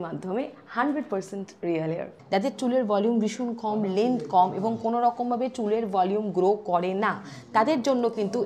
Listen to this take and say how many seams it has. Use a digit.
1